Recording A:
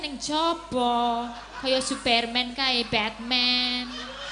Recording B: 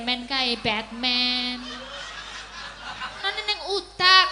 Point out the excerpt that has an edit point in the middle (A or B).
B